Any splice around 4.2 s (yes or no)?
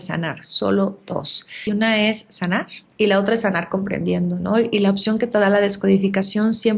no